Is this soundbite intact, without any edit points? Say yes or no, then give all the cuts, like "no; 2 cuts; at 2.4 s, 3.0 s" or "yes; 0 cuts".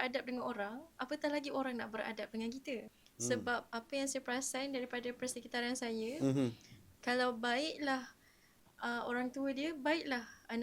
no; 1 cut; at 3.0 s